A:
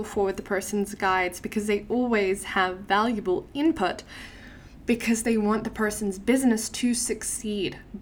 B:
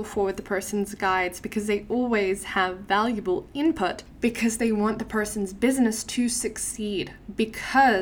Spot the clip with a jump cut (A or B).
B